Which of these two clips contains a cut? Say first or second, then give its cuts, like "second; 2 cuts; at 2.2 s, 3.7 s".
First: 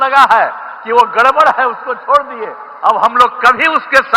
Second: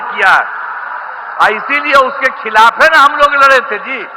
second; 1 cut; at 1.3 s